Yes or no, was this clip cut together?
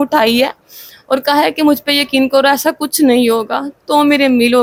no